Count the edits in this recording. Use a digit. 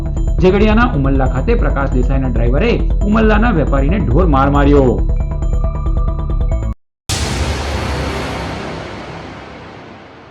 1